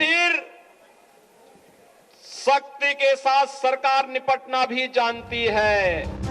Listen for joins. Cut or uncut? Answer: uncut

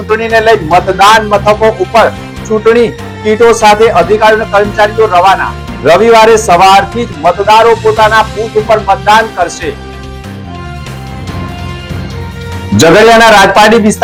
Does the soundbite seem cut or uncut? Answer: uncut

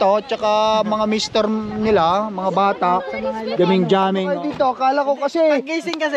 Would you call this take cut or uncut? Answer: cut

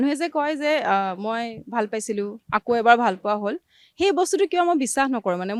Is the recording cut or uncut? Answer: uncut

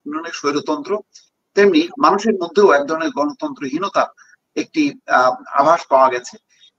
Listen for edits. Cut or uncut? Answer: uncut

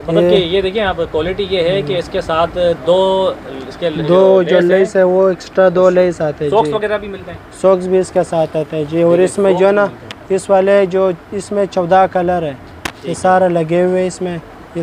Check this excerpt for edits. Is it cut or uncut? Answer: uncut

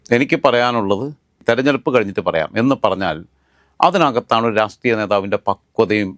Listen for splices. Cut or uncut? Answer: cut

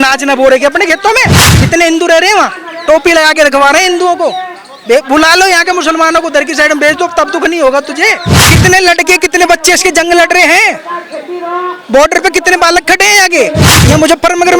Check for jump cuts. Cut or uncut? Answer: cut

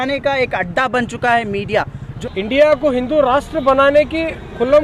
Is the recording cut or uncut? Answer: cut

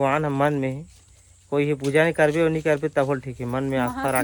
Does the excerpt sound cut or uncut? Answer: uncut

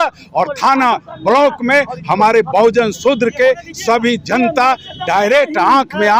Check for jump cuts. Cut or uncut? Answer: uncut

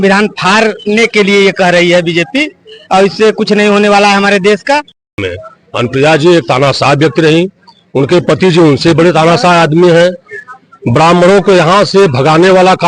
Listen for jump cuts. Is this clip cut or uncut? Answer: cut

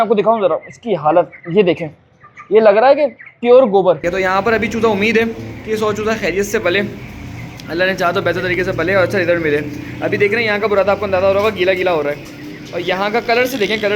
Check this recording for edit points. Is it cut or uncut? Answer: cut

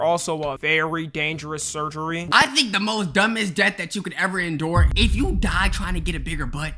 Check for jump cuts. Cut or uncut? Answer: cut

